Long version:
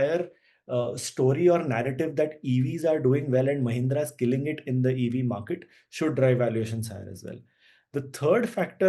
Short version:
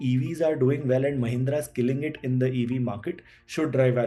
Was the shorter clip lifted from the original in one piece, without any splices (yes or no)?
yes